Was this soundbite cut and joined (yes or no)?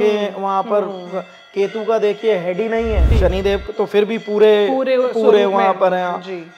yes